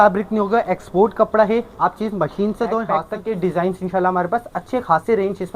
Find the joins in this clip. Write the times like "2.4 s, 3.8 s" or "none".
3.1 s

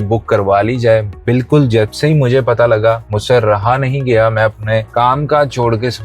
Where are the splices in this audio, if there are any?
3.1 s, 4.9 s

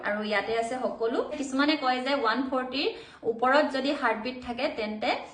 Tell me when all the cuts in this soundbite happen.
1.4 s

